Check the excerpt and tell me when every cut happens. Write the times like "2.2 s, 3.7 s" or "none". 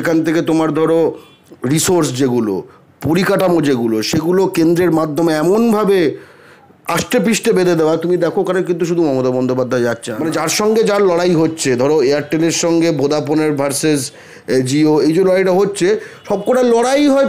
10.1 s